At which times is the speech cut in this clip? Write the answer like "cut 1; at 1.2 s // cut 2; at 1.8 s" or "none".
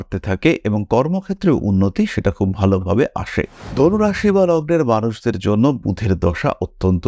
cut 1; at 3.6 s